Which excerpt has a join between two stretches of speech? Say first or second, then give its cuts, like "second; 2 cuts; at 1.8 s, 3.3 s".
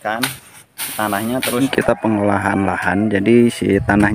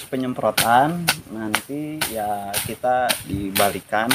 first; 1 cut; at 1.6 s